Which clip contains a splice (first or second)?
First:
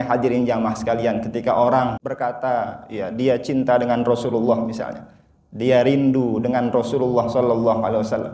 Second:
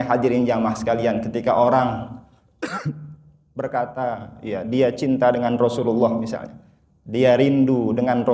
first